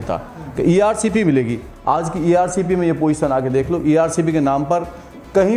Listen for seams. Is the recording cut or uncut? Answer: uncut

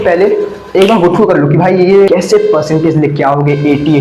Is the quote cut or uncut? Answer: cut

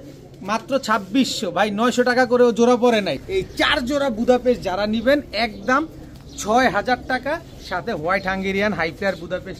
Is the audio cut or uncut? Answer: cut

